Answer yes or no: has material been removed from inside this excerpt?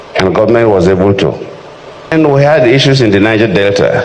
yes